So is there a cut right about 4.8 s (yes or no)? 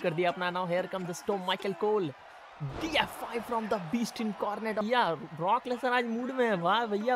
yes